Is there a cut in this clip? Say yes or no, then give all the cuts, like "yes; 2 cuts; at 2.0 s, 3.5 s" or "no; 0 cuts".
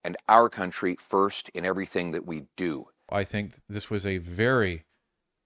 yes; 1 cut; at 3.1 s